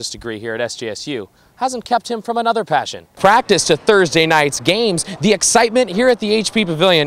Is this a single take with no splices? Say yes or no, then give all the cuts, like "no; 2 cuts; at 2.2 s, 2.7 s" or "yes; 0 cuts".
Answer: no; 1 cut; at 3.2 s